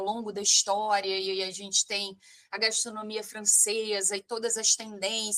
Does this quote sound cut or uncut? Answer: uncut